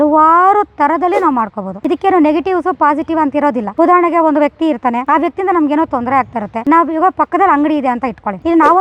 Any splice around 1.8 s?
no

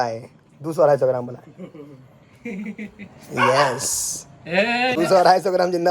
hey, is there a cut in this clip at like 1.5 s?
no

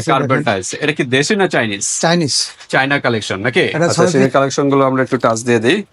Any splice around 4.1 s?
yes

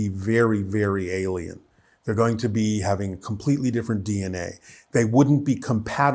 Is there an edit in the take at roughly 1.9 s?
no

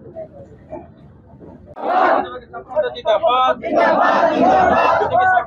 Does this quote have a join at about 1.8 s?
yes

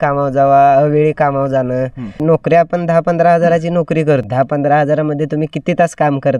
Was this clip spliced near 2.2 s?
yes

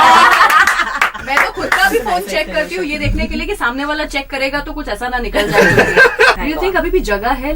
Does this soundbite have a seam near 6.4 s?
yes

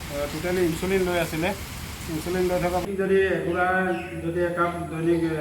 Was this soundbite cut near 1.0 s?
no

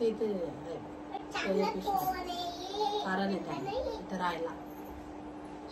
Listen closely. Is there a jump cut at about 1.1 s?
no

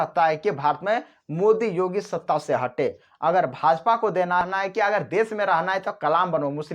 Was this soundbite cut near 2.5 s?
no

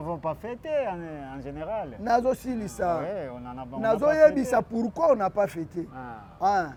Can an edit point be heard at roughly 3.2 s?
no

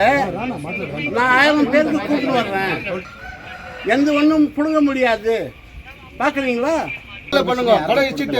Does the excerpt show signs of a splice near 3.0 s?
yes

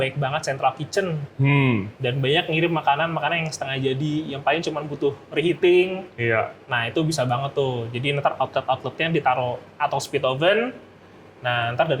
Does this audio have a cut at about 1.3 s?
no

